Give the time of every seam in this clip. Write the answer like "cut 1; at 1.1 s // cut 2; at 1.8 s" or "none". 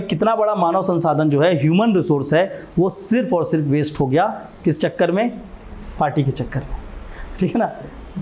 none